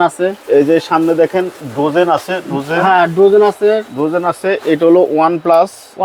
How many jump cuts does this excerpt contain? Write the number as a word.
zero